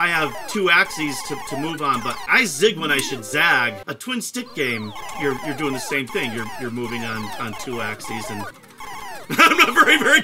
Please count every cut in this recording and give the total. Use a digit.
2